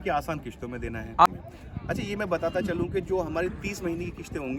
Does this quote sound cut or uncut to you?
cut